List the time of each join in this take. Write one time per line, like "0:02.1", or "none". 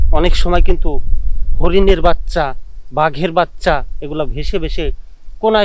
none